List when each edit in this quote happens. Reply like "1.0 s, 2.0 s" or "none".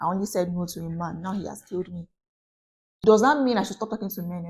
3.0 s